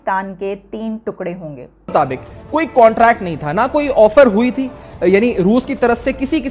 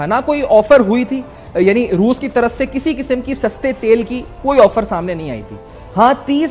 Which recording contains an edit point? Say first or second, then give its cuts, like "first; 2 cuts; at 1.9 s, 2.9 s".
first; 1 cut; at 1.9 s